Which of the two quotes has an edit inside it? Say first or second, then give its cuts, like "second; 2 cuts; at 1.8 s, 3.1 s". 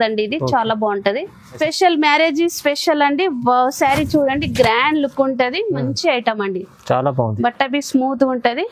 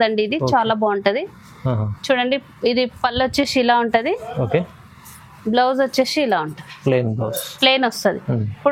first; 1 cut; at 1.6 s